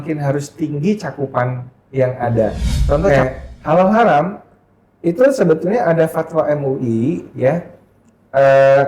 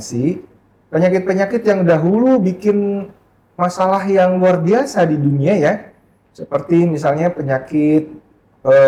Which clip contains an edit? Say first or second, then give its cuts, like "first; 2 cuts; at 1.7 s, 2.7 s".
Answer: first; 1 cut; at 3.1 s